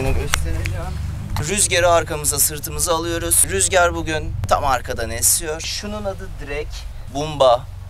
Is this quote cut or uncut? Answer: cut